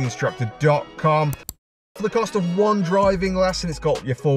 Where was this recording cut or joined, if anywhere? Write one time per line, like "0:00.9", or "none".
0:01.9